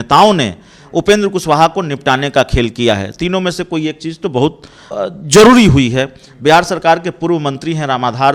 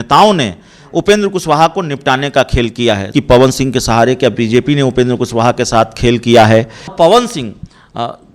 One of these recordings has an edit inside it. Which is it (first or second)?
second